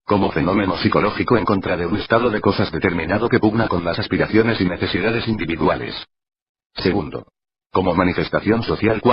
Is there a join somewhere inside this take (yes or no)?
yes